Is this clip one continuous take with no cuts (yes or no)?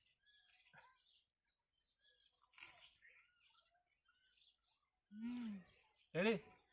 yes